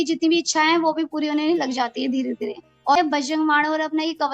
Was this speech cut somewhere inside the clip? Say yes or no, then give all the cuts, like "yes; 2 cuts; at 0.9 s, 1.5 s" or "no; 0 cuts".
yes; 1 cut; at 3.0 s